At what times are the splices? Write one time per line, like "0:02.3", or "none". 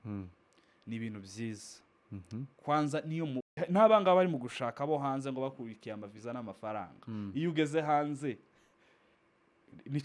0:03.5